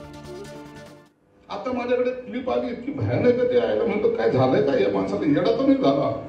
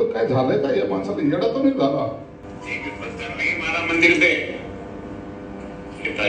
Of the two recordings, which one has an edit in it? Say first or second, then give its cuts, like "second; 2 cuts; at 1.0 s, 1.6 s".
first; 1 cut; at 1.0 s